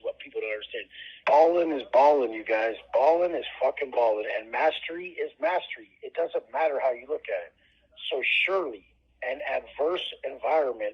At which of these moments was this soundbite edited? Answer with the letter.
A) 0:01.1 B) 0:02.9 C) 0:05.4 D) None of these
A